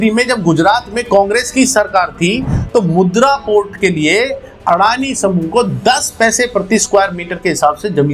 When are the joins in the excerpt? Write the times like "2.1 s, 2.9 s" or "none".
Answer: none